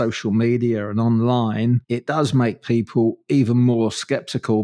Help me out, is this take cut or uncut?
cut